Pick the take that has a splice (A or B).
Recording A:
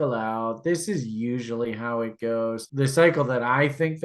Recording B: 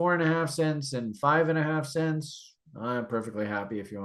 A